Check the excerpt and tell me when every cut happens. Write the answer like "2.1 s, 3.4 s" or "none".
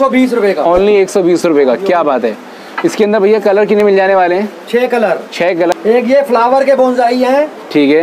5.7 s